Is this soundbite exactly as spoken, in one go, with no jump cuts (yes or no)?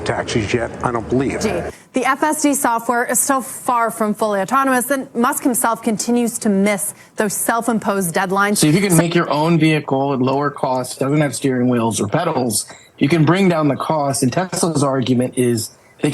no